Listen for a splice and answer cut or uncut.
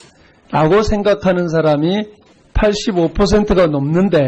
cut